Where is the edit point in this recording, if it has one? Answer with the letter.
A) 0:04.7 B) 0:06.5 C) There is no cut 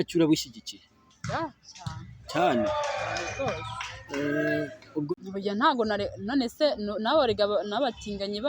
A